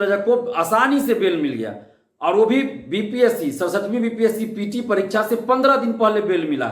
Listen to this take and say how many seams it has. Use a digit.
0